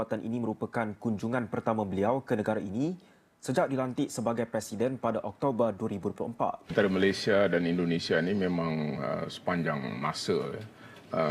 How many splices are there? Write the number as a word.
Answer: one